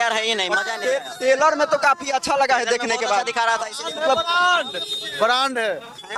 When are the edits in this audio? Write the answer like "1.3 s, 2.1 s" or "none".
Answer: none

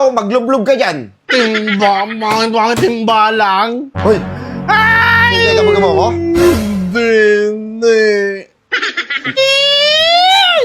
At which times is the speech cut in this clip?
9.4 s

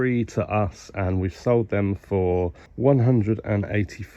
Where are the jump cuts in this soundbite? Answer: 2.6 s

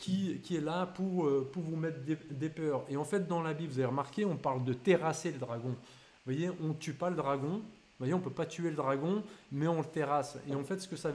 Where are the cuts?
none

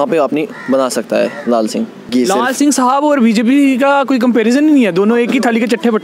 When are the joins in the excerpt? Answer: 2.1 s

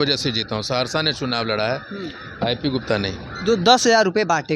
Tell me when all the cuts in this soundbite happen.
none

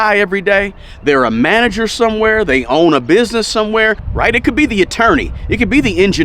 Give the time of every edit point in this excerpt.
4.0 s

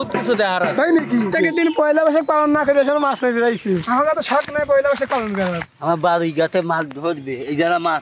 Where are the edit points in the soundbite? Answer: 1.3 s, 3.8 s, 5.7 s

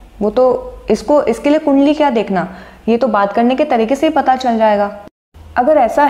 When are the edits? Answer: 5.0 s

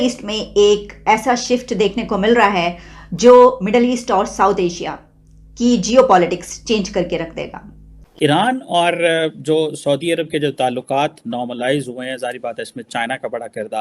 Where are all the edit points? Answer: 8.0 s

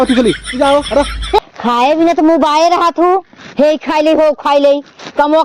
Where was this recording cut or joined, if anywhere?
1.4 s

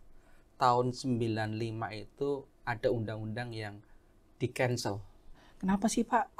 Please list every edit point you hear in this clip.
5.5 s

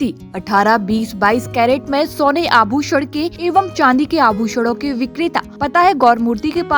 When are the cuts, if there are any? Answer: 3.3 s, 5.5 s

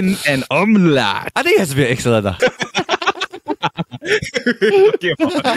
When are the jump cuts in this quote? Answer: 1.2 s, 2.4 s

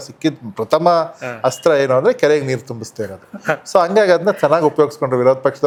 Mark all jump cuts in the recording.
none

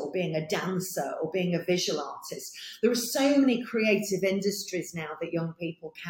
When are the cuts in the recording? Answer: none

